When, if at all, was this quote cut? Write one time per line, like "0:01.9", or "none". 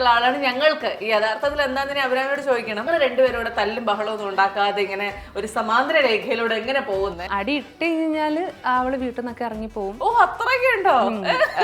0:02.9
0:07.2